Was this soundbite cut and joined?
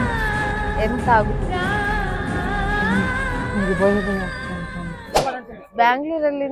yes; 1 cut; at 5.2 s

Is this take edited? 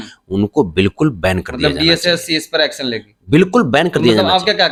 no; 0 cuts

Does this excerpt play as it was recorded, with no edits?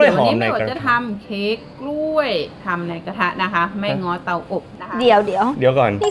yes; 0 cuts

